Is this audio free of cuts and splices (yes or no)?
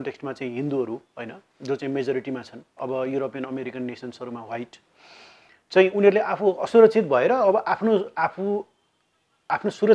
yes